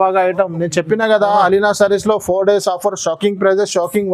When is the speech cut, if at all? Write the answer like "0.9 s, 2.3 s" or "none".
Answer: none